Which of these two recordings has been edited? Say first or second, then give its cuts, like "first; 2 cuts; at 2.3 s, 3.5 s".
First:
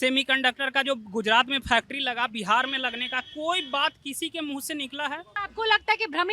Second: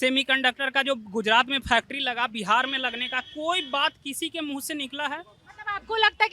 first; 1 cut; at 5.4 s